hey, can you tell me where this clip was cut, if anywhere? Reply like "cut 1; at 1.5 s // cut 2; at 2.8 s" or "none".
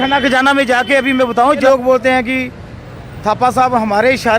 cut 1; at 1.6 s